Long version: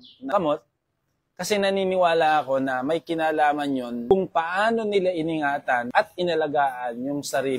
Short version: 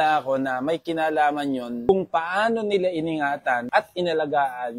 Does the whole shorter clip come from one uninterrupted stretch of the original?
yes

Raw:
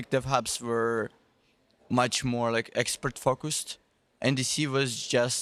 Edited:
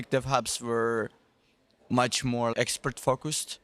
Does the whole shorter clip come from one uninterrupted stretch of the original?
no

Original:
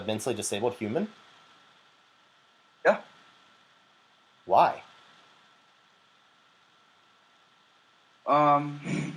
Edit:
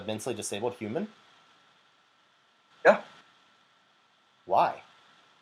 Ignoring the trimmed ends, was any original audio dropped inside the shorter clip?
no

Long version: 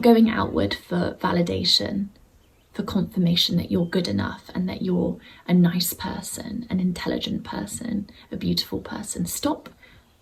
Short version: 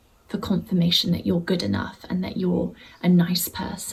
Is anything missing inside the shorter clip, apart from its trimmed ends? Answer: no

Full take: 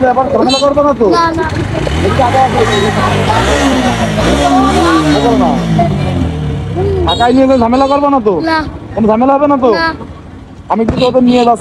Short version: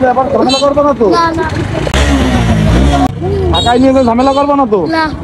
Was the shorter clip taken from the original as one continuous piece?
no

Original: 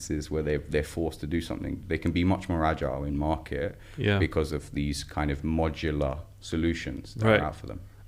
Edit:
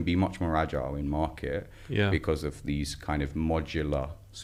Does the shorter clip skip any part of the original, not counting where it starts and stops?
no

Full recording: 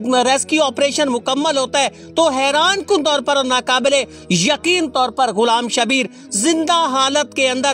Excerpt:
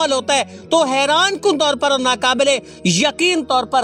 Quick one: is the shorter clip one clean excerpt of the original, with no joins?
yes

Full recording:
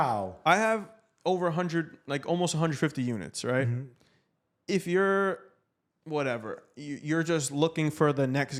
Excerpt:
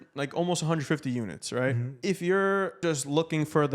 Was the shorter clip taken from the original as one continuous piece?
no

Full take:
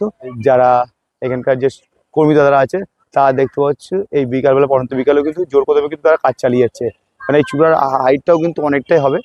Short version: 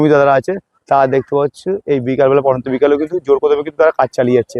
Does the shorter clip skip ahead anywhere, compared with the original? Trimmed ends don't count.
no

